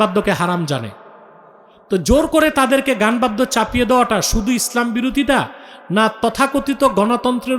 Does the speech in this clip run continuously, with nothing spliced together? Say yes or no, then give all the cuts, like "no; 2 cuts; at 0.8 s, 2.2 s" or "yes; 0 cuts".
yes; 0 cuts